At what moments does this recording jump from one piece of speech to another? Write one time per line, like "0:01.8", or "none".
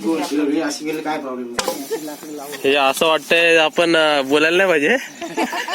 0:01.5